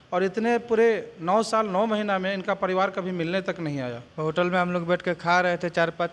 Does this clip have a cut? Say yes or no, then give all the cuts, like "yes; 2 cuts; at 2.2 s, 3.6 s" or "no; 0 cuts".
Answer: yes; 1 cut; at 4.0 s